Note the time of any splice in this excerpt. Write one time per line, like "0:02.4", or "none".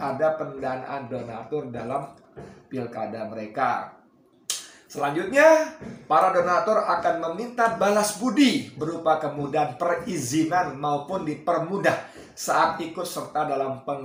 none